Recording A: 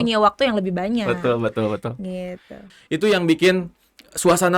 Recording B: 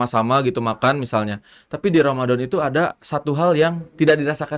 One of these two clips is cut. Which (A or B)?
A